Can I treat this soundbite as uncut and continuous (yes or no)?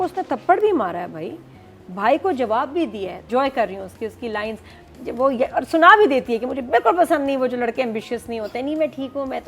no